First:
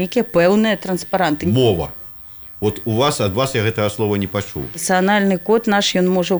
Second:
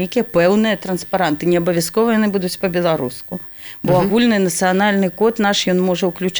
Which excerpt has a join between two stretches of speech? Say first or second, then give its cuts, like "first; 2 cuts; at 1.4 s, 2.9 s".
first; 2 cuts; at 1.4 s, 4.8 s